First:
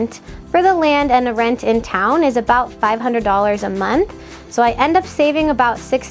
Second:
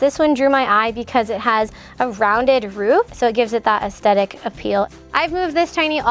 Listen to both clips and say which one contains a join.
second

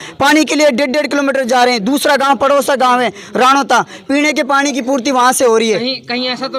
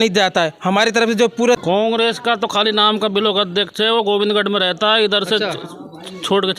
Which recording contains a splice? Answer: second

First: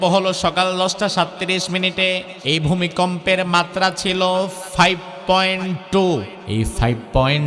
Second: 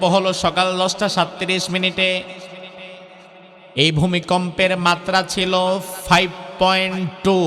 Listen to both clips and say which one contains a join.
first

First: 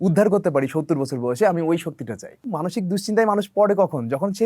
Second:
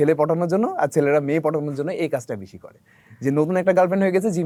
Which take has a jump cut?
first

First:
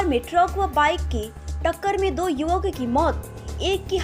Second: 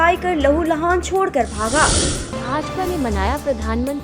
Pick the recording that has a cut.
second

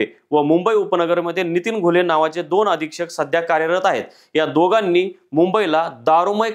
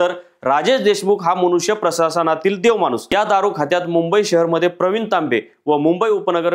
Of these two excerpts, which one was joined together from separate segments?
second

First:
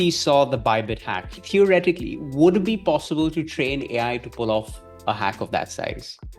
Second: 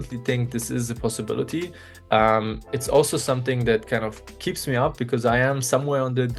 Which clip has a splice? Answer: first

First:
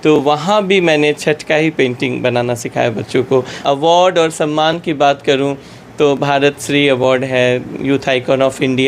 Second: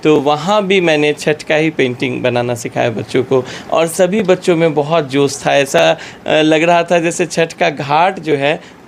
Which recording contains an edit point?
first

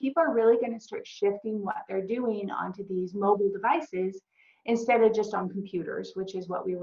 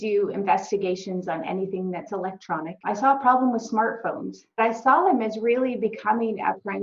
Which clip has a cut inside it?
second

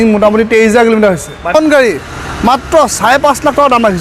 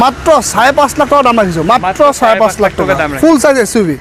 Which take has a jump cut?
first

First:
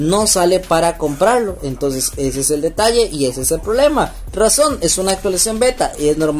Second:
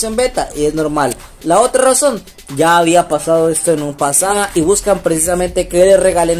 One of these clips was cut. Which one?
second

